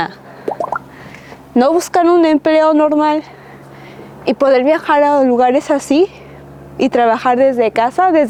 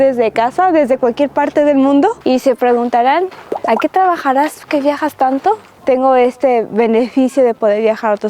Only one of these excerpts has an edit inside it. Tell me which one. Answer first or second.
second